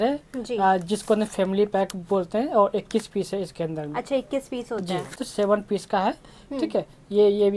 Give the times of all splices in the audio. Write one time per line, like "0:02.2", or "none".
0:05.2